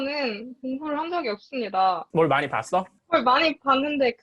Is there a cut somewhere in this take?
yes; 1 cut; at 2.0 s

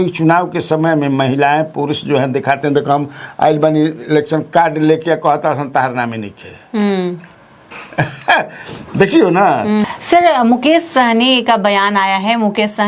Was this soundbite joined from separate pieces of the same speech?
yes; 1 cut; at 9.8 s

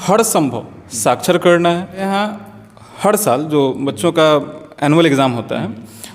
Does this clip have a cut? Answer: yes; 1 cut; at 2.0 s

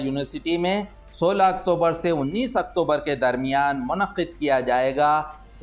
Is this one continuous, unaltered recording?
yes; 0 cuts

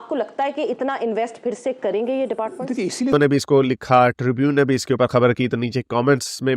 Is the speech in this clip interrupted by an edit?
yes; 1 cut; at 3.1 s

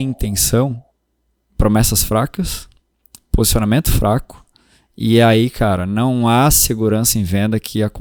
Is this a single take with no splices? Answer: yes; 0 cuts

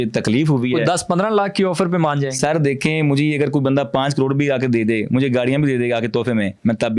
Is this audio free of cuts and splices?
yes; 0 cuts

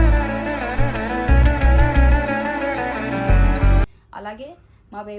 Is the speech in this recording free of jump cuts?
yes; 0 cuts

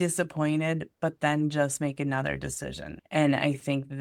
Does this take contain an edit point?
yes; 1 cut; at 3.0 s

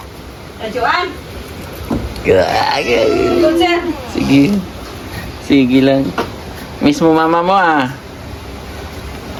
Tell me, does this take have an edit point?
no; 0 cuts

